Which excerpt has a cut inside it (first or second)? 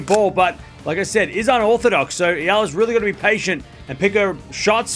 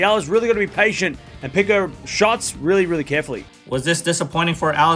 second